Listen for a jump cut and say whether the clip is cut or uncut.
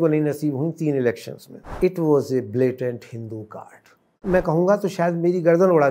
cut